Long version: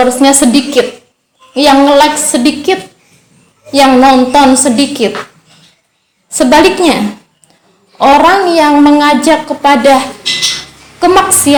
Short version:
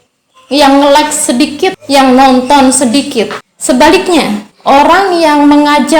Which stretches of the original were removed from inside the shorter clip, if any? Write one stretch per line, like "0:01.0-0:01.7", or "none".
0:02.9-0:03.6
0:05.3-0:06.2
0:07.2-0:07.8